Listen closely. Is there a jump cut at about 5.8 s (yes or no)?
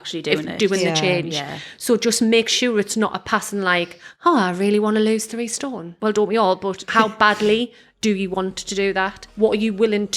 yes